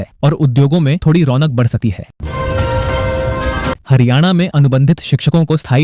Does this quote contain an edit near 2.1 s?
yes; 2 cuts; at 2.1 s, 3.8 s

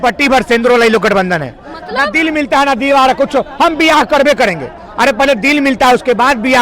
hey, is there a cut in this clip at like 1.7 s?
no; 0 cuts

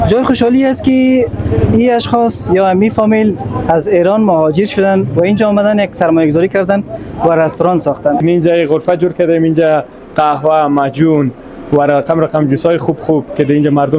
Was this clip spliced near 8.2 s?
yes; 1 cut; at 8.2 s

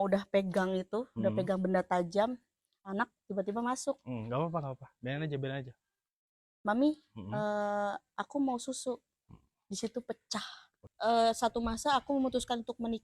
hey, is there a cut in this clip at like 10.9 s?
yes; 1 cut; at 10.9 s

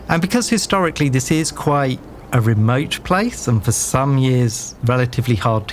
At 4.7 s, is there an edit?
yes; 1 cut; at 4.7 s

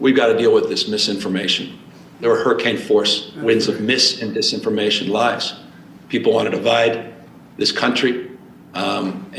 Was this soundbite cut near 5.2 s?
no; 0 cuts

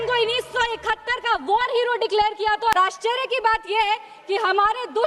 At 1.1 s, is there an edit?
no; 1 cut; at 2.8 s

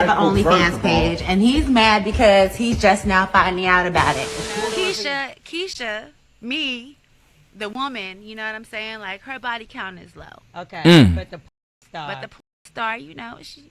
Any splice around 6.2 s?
no; 1 cut; at 4.4 s

